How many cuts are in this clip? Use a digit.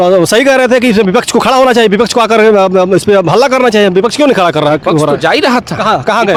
0